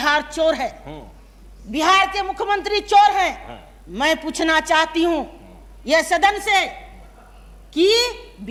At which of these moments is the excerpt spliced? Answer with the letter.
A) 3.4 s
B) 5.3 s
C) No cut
C